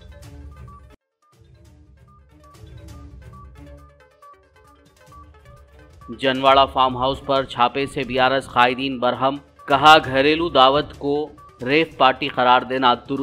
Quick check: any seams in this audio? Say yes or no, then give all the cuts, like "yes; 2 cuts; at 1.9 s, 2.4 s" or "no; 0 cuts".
no; 0 cuts